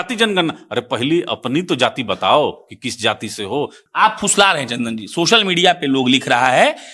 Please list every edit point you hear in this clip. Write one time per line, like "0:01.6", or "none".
0:03.8